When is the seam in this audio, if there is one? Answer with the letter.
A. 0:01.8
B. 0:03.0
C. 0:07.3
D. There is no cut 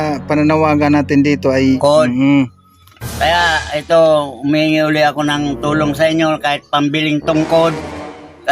A